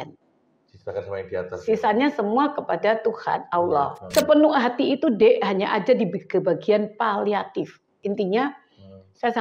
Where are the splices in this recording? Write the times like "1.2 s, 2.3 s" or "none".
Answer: 4.0 s, 7.9 s